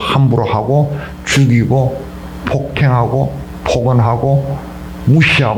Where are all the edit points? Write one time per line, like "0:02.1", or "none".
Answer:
none